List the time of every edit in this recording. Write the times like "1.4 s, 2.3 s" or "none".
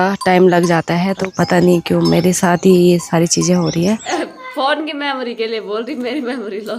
1.3 s, 4.1 s